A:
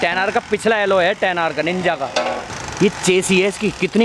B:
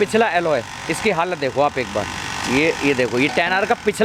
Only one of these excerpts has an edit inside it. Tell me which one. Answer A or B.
A